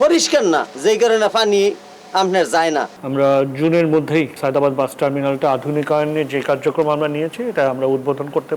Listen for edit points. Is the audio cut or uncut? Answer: cut